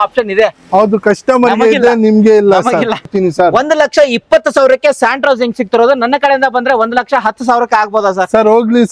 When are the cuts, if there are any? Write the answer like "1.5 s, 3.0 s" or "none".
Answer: 3.1 s